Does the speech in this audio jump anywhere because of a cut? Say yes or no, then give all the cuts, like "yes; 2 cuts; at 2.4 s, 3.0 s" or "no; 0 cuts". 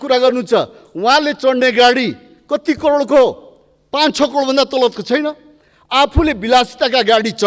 no; 0 cuts